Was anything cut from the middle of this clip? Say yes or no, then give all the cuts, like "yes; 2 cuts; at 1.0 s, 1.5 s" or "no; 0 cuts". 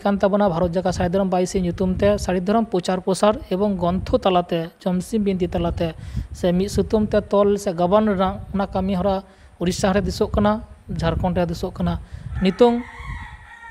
no; 0 cuts